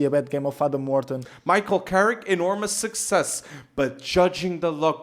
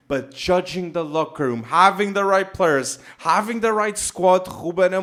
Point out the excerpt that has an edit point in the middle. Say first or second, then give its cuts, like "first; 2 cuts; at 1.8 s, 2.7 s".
first; 1 cut; at 1.2 s